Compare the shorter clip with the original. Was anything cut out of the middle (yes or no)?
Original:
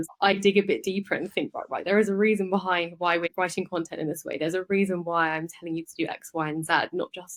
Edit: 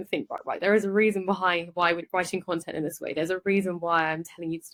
no